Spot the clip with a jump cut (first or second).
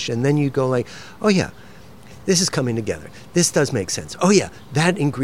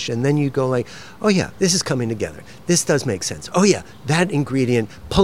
second